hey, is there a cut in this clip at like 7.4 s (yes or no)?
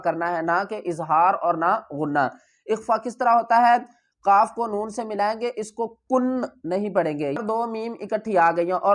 yes